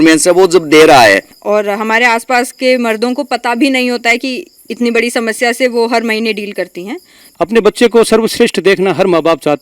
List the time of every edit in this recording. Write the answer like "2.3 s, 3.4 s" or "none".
1.3 s, 7.2 s